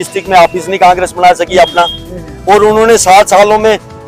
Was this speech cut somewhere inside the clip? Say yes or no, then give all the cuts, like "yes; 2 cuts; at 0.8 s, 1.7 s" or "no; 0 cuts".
no; 0 cuts